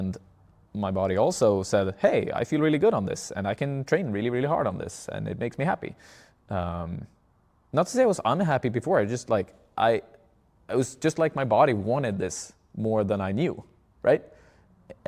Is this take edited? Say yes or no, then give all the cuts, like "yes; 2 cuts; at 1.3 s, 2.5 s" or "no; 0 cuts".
no; 0 cuts